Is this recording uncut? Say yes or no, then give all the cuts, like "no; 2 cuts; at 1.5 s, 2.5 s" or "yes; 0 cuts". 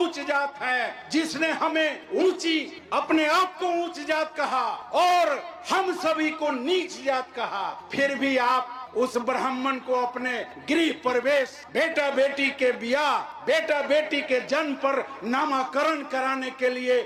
yes; 0 cuts